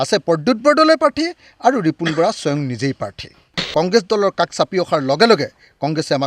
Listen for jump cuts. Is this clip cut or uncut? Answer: cut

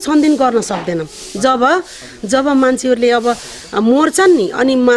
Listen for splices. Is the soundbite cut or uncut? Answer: uncut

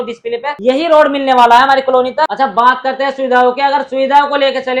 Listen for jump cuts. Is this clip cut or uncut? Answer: uncut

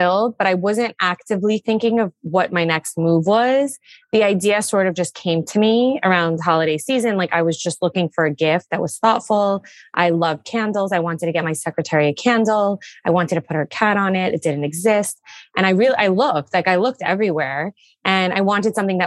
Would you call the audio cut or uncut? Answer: uncut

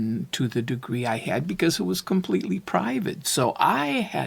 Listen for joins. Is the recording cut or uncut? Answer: uncut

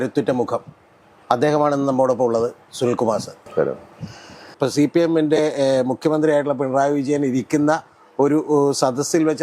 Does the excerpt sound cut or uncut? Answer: cut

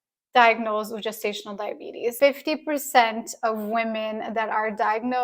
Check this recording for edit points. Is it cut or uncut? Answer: cut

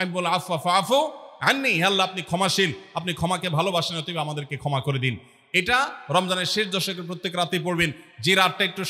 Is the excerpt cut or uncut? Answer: uncut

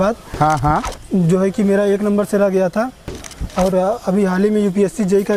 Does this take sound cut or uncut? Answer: uncut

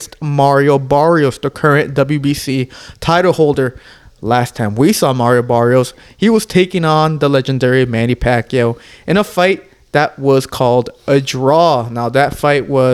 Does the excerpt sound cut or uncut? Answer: uncut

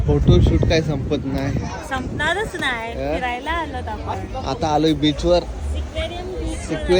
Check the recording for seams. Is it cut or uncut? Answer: uncut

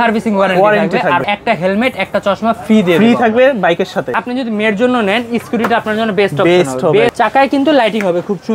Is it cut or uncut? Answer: cut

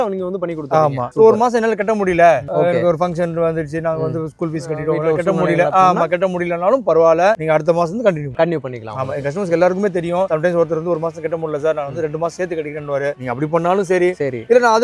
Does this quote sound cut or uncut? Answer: uncut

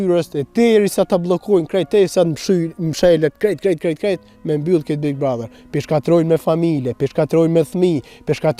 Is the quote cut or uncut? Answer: uncut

